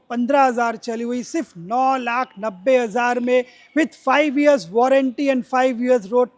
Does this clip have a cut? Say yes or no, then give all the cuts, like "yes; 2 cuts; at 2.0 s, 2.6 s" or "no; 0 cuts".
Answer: no; 0 cuts